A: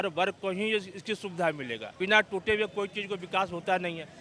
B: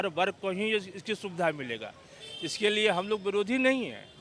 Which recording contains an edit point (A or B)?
A